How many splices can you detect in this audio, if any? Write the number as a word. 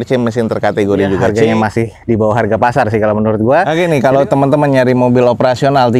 two